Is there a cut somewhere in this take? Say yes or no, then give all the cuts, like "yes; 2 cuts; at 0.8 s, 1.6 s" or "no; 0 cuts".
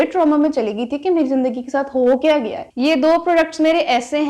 yes; 1 cut; at 2.6 s